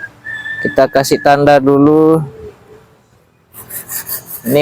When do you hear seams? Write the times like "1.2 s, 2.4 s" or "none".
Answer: none